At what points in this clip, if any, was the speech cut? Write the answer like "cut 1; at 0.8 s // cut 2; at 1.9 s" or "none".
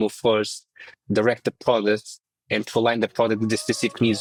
none